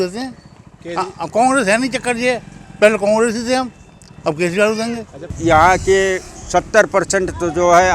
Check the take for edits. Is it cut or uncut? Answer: cut